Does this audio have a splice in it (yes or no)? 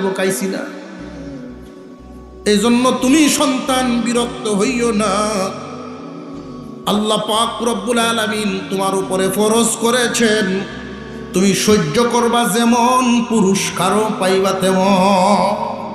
yes